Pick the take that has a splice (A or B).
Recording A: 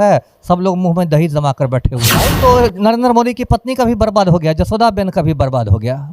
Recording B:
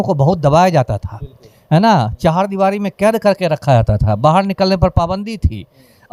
A